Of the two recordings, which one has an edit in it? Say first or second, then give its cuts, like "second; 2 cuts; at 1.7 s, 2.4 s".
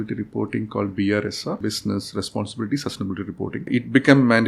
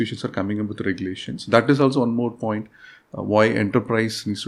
first; 2 cuts; at 1.6 s, 3.7 s